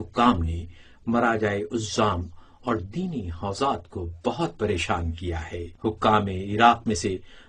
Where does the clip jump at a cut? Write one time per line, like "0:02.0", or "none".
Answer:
0:00.9